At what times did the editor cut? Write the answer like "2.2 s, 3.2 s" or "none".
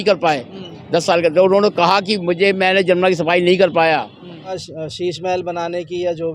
4.6 s